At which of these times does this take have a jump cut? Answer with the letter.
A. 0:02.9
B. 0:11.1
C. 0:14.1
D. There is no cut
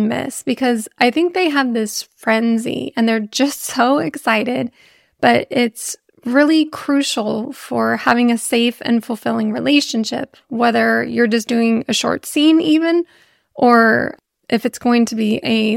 C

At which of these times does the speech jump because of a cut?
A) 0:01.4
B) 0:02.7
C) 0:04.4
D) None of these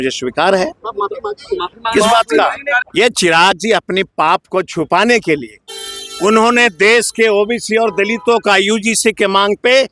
B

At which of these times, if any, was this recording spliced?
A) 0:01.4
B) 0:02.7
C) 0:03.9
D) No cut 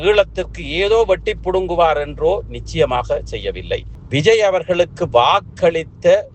C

